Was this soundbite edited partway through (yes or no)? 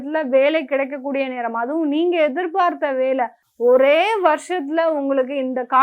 yes